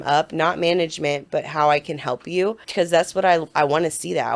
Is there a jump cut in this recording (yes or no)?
yes